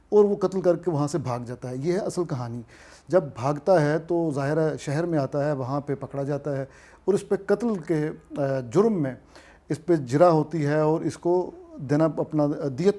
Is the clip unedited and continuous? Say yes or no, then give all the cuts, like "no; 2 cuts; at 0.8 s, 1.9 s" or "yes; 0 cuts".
yes; 0 cuts